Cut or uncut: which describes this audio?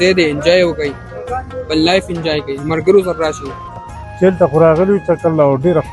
cut